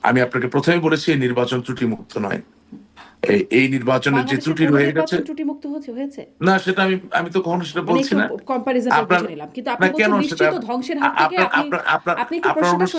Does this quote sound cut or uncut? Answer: uncut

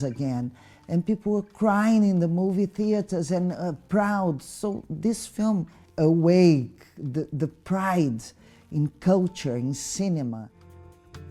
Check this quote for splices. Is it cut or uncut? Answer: uncut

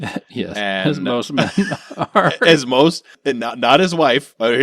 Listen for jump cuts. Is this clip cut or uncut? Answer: cut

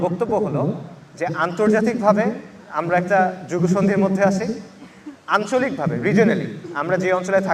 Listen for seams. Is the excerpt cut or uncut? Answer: uncut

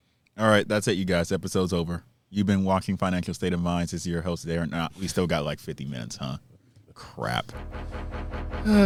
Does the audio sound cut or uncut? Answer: uncut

